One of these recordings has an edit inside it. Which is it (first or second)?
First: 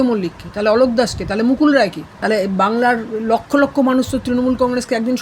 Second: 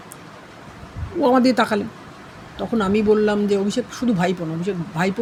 first